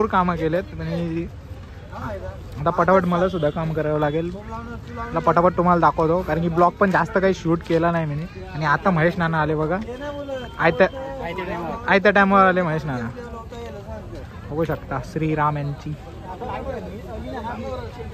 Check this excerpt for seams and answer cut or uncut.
uncut